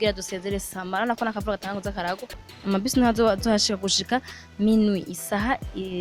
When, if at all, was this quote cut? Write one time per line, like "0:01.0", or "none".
0:02.5